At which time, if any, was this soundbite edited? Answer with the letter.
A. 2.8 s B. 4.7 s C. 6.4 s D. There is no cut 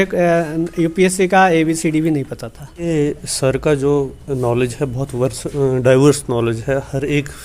A